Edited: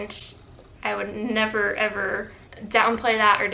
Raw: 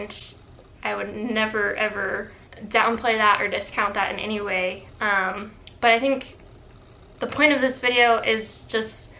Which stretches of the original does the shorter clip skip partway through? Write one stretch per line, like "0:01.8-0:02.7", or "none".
none